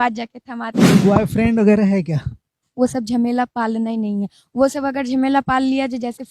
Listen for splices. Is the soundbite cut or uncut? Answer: cut